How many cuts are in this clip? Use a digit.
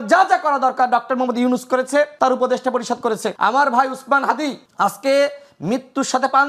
3